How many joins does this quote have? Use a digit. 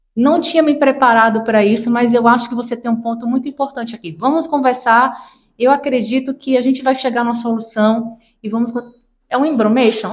0